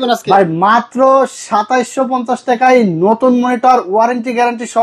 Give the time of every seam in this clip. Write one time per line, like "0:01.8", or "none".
none